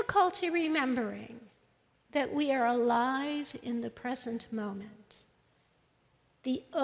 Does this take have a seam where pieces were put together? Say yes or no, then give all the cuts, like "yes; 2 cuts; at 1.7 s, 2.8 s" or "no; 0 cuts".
no; 0 cuts